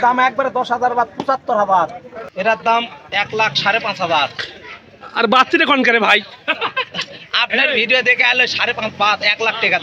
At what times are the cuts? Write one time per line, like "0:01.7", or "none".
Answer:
0:02.2